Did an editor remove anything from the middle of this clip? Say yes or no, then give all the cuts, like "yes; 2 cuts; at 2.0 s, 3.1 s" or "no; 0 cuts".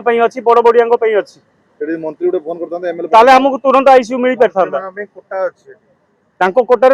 no; 0 cuts